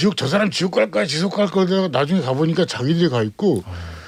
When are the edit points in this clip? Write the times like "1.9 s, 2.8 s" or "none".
none